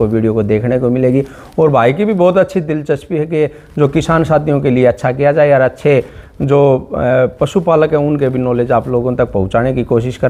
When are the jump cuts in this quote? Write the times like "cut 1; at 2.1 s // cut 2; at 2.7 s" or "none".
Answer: none